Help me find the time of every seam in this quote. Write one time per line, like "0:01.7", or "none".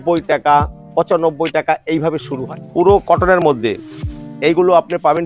0:02.4